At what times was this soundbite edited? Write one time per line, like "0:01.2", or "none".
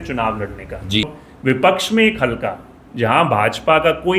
0:01.1